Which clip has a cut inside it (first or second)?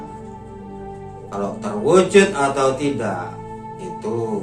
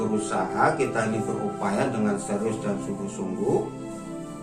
first